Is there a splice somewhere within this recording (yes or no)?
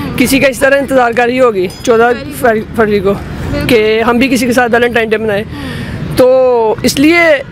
no